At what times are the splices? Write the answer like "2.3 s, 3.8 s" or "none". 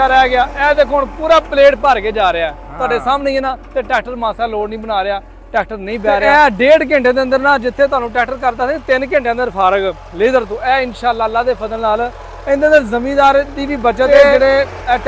6.3 s, 14.1 s